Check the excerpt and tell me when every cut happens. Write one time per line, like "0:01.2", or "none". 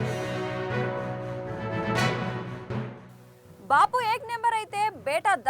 0:02.3